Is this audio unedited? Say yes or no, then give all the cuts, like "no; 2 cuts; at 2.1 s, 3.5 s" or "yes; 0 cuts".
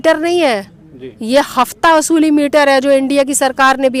yes; 0 cuts